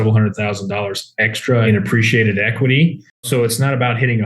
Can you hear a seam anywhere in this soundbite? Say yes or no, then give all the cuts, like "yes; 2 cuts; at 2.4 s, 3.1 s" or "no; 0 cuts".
yes; 2 cuts; at 1.7 s, 3.3 s